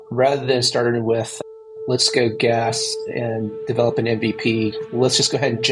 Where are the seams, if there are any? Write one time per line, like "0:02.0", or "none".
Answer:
none